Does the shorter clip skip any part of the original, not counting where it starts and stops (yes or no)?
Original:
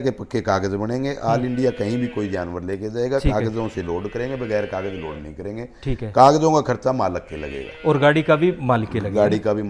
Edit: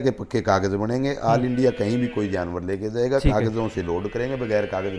no